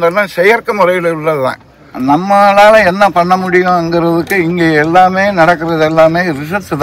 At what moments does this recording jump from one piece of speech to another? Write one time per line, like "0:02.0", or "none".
0:01.9